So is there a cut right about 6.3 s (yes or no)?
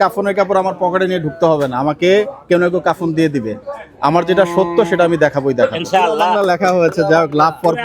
yes